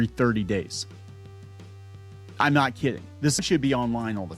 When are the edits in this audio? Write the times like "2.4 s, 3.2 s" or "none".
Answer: 3.4 s